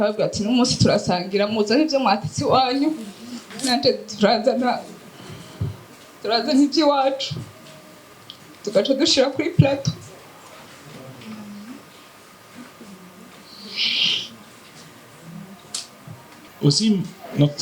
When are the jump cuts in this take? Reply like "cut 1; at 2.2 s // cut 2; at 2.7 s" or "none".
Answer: cut 1; at 16.5 s